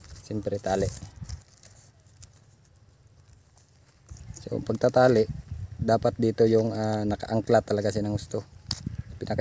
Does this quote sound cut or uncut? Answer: uncut